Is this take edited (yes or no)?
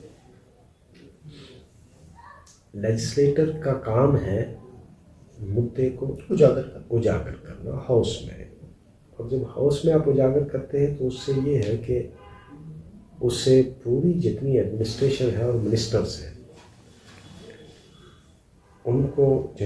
no